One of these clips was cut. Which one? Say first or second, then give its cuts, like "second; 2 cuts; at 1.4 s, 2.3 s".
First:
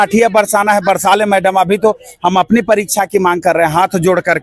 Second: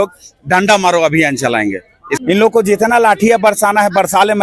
second; 1 cut; at 2.1 s